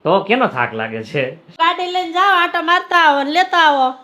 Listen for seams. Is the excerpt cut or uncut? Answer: cut